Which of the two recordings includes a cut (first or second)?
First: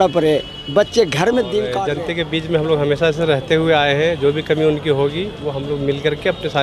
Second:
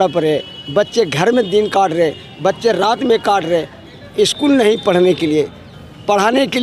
first